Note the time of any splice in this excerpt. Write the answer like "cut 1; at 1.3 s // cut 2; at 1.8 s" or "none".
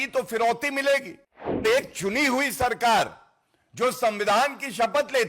cut 1; at 1.6 s

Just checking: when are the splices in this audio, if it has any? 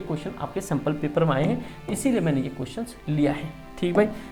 none

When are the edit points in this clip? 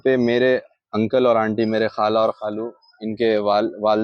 none

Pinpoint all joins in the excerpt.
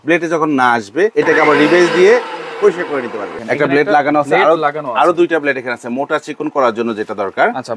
cut 1; at 1.1 s // cut 2; at 3.3 s

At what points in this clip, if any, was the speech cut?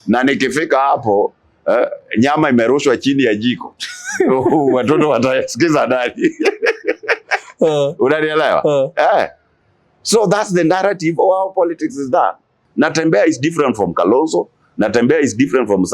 cut 1; at 12.6 s

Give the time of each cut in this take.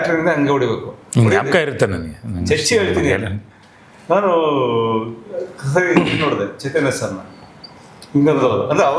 none

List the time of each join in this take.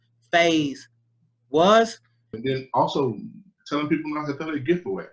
cut 1; at 2.3 s

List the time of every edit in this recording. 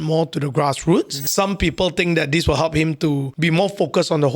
cut 1; at 1.3 s // cut 2; at 3.3 s

